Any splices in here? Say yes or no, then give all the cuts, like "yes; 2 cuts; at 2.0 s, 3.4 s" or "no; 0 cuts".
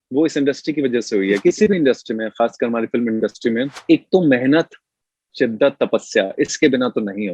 yes; 2 cuts; at 1.4 s, 3.8 s